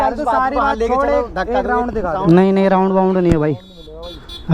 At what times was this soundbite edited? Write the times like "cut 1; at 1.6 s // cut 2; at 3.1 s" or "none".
none